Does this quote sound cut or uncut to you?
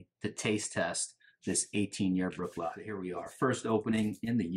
cut